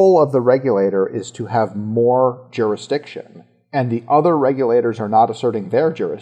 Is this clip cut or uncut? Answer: uncut